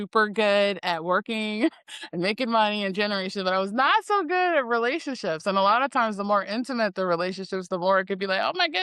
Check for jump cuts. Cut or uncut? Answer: uncut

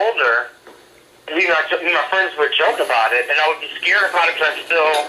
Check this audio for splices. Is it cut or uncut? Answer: cut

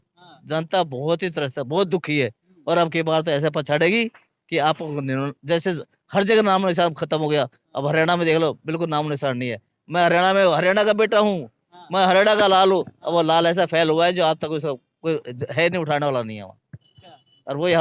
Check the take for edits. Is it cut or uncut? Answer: uncut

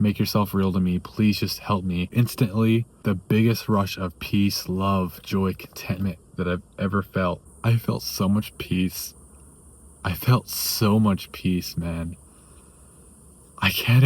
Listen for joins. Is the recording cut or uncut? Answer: cut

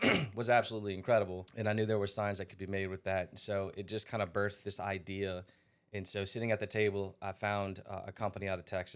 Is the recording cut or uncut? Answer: cut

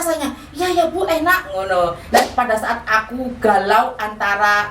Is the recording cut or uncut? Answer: cut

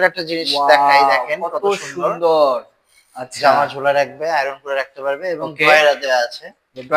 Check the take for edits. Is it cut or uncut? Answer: uncut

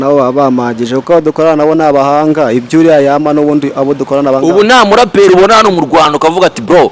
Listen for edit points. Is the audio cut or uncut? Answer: uncut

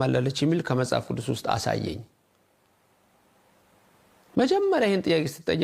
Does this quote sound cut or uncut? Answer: uncut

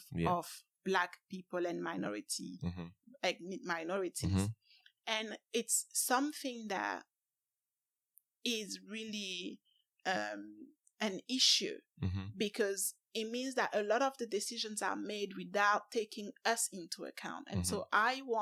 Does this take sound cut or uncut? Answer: uncut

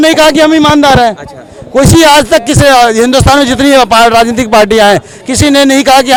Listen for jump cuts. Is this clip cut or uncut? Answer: uncut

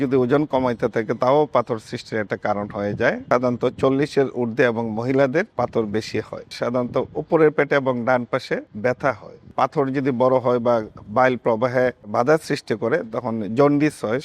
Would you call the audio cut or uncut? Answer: cut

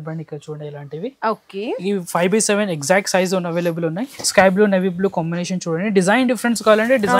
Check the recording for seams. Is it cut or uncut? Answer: cut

